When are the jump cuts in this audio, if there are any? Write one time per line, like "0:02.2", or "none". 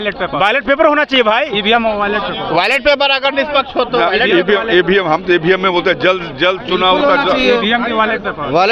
none